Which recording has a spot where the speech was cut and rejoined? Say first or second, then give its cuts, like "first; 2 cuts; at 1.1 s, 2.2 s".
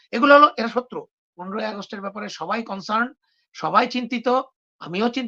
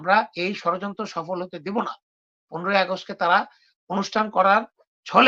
first; 1 cut; at 1.4 s